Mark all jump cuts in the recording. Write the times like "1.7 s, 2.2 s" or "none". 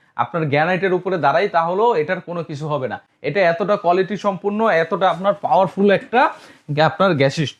none